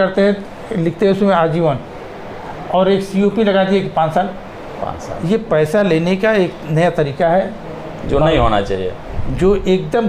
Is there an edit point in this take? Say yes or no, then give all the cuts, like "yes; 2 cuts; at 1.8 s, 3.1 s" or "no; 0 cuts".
no; 0 cuts